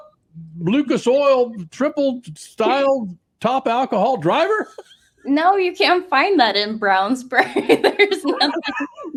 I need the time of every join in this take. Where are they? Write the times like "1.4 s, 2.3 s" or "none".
none